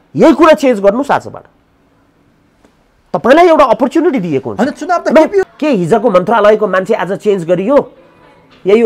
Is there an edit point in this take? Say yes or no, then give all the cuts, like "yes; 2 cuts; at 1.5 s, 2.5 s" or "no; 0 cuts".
yes; 1 cut; at 5.5 s